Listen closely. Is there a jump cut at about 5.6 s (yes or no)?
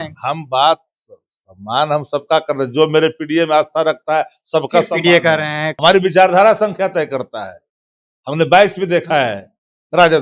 yes